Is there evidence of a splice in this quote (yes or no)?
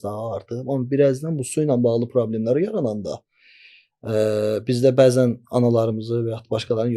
no